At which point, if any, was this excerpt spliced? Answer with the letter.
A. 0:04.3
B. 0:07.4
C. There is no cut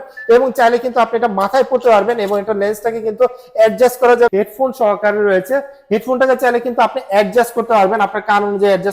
A